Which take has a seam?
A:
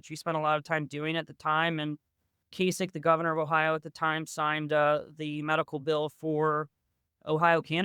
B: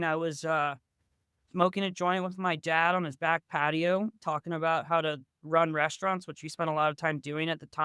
A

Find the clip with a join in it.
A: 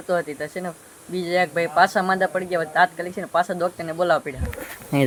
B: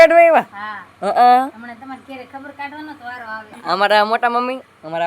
B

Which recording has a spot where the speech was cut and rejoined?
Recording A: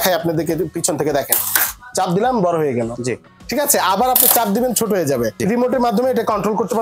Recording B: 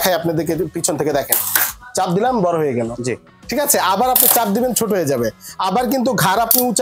A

